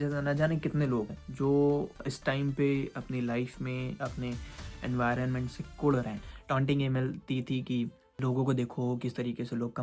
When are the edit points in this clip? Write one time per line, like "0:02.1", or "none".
0:01.2
0:02.0
0:04.0
0:06.3
0:08.0